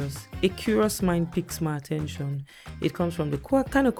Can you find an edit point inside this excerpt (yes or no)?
no